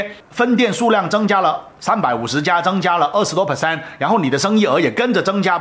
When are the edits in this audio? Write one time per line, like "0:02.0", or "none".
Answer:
none